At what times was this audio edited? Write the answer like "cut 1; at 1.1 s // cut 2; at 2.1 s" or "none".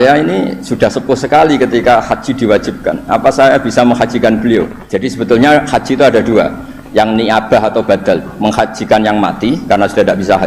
cut 1; at 4.9 s